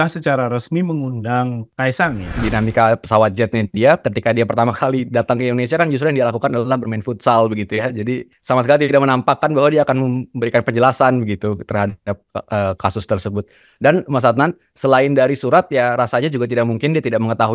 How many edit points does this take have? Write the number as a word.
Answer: three